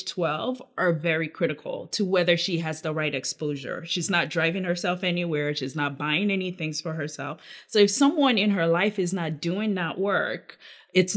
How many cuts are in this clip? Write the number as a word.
zero